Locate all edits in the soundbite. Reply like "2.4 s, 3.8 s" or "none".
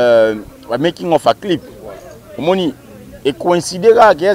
none